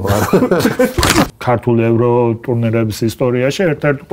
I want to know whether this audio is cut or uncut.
cut